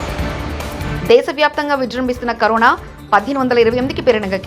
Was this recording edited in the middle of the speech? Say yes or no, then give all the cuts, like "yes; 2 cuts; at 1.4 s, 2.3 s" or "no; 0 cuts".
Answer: yes; 1 cut; at 0.9 s